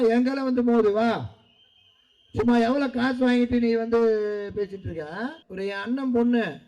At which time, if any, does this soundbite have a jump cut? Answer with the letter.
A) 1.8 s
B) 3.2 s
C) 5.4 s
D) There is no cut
C